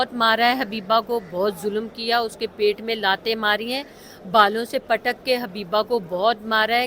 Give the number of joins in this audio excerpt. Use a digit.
0